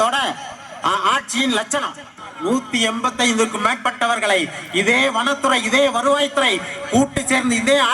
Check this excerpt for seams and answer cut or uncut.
cut